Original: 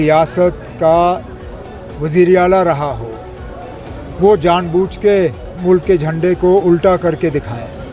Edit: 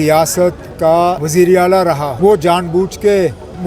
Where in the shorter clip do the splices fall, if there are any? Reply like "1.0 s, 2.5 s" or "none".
1.2 s, 2.1 s